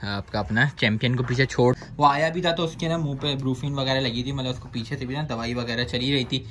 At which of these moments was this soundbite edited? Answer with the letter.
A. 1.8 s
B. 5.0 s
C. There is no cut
A